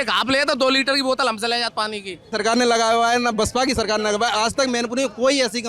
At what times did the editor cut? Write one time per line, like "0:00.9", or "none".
0:02.2